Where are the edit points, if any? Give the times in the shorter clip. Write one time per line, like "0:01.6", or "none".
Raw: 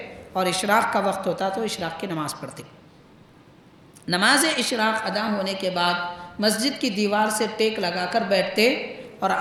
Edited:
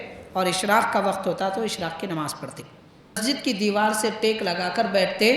0:03.2

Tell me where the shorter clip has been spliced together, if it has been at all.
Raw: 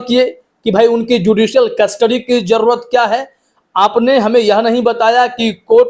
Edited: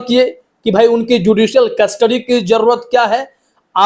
none

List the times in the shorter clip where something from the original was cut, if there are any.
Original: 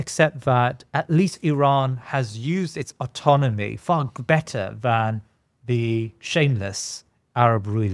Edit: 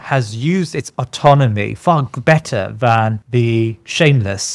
0:03.2

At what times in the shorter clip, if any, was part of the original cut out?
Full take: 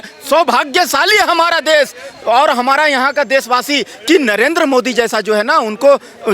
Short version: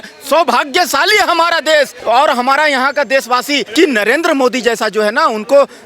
0:02.0
0:03.6

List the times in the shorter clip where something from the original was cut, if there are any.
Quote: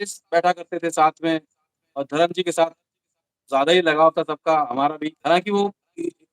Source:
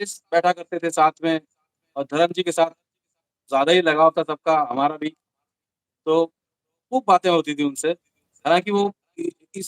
0:05.1

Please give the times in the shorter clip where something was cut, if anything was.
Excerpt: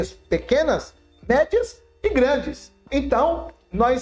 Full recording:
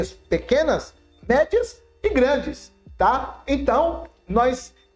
0:02.8

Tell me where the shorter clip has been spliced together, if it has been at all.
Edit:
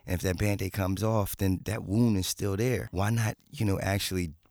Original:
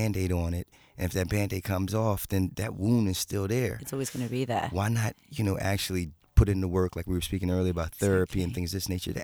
0:02.9

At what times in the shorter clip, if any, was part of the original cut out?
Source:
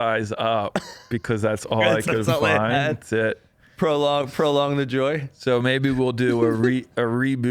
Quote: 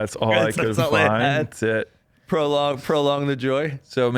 none

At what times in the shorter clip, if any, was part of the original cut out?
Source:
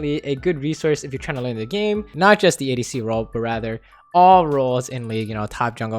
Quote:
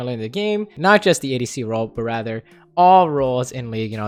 none

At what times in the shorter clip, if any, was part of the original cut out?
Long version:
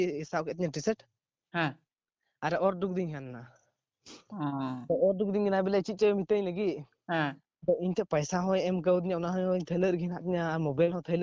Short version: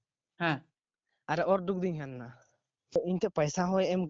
0:03.0

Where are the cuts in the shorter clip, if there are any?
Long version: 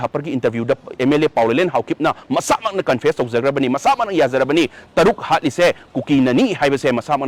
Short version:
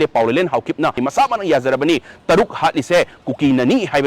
0:01.0

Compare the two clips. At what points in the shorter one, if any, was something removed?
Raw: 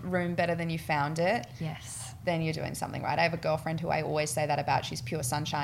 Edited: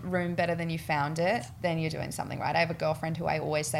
0:01.5

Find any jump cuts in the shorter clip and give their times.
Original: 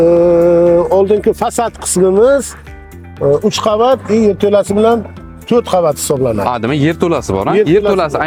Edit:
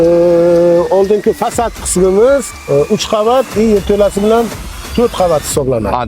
0:02.5

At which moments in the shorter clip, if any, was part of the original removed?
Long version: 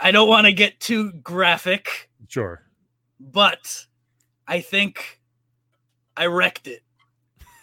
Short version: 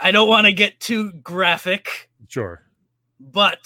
none

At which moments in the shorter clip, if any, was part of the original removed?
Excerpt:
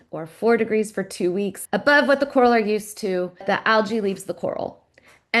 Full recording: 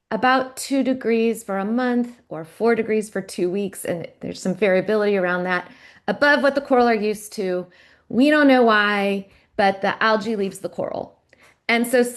0:01.6
0:03.4

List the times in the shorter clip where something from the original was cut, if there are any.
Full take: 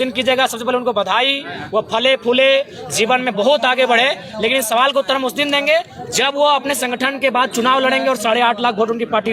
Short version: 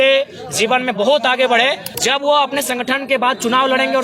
0:01.9

